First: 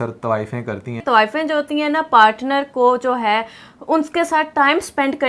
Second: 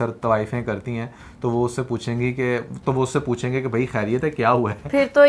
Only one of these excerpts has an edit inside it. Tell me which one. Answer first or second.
first